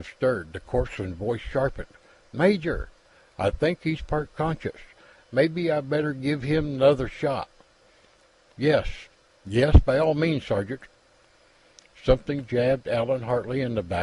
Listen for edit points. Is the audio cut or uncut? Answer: uncut